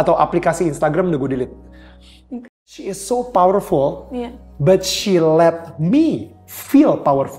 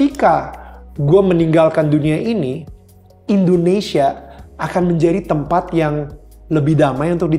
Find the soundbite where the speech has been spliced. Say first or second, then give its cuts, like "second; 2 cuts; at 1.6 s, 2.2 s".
first; 1 cut; at 2.5 s